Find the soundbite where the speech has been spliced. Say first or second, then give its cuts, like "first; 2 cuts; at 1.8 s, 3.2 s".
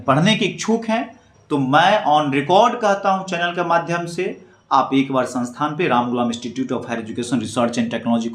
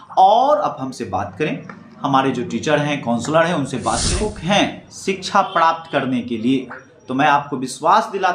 second; 1 cut; at 4.1 s